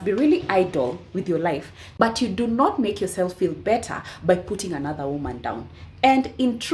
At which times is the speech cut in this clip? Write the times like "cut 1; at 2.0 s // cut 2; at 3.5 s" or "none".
cut 1; at 1.8 s